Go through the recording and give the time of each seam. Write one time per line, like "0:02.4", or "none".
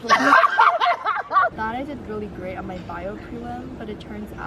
0:01.5